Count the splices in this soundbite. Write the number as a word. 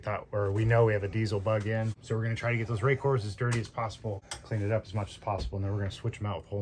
two